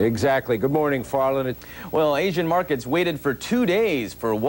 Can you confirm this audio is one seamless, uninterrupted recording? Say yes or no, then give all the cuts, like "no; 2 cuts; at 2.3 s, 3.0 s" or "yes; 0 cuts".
no; 1 cut; at 1.5 s